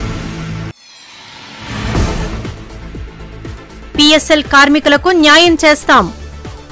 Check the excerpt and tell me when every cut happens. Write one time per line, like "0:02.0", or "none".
0:02.3